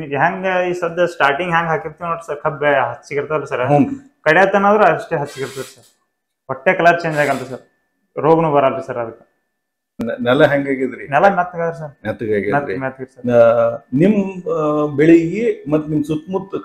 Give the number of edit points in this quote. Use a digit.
1